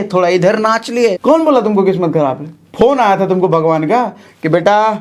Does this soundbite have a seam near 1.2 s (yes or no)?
yes